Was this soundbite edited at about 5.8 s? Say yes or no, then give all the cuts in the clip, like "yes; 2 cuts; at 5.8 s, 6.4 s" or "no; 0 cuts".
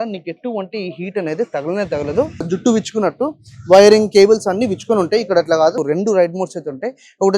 yes; 2 cuts; at 2.5 s, 5.8 s